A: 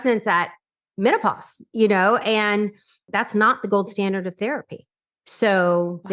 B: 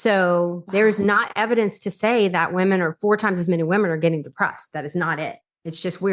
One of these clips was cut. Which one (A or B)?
A